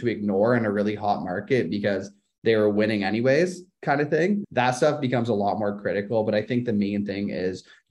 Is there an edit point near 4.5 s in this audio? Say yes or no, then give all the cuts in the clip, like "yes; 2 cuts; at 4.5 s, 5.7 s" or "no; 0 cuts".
yes; 1 cut; at 4.5 s